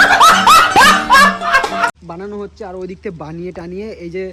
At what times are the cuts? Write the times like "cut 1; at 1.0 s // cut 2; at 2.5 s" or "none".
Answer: cut 1; at 1.9 s